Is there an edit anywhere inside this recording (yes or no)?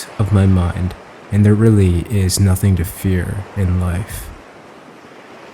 yes